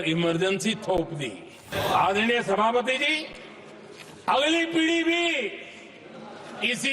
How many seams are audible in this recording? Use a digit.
1